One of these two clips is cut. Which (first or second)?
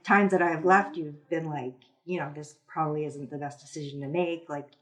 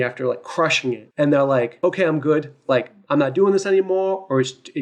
second